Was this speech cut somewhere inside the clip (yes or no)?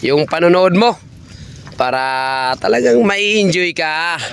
no